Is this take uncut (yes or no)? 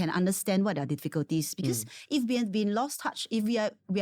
yes